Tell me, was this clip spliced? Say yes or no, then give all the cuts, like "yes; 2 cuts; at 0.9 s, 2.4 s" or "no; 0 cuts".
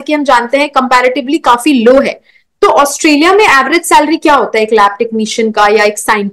no; 0 cuts